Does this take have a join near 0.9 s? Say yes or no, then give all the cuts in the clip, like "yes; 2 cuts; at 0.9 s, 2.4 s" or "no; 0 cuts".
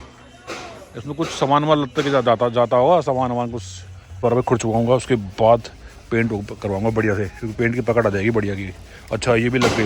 no; 1 cut; at 4.2 s